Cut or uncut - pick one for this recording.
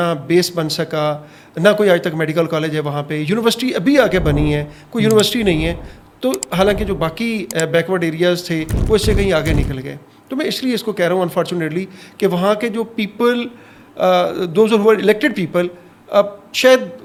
uncut